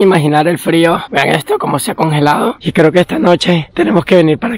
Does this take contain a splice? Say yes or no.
yes